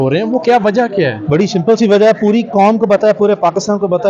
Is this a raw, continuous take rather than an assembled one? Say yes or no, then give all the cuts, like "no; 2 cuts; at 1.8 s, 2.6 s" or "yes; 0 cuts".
yes; 0 cuts